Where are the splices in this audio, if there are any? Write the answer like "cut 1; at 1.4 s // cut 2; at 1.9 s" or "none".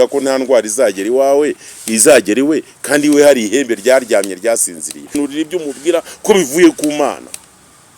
cut 1; at 5.2 s